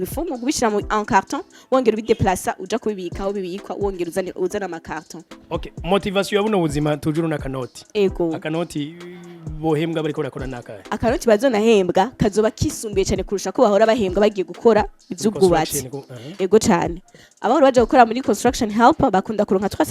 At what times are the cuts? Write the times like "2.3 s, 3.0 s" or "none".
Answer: 5.3 s